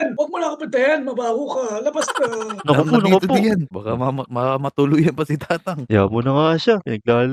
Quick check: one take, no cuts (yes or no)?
yes